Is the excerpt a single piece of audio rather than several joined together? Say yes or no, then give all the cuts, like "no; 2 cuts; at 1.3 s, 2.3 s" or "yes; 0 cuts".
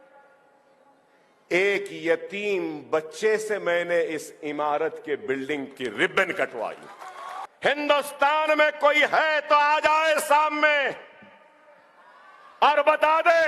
no; 1 cut; at 7.4 s